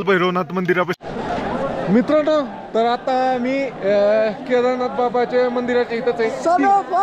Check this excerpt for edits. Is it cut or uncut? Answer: cut